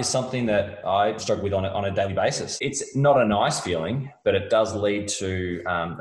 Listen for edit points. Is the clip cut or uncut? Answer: cut